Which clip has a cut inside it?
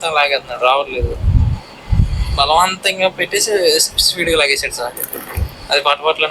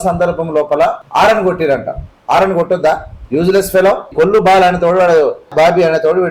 second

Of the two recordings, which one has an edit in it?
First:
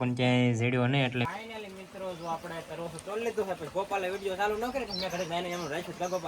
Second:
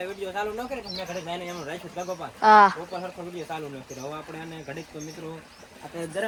first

